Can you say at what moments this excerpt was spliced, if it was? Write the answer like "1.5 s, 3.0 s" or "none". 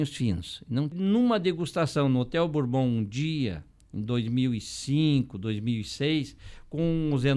0.9 s